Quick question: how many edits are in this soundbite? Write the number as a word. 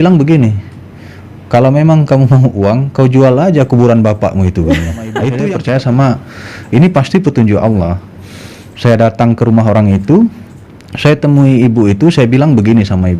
one